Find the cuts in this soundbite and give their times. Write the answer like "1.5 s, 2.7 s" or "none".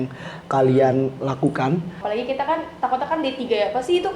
2.0 s